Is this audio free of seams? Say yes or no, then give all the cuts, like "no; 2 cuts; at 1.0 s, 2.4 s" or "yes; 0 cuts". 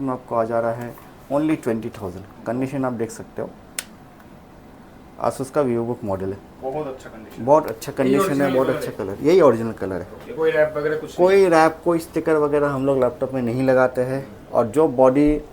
yes; 0 cuts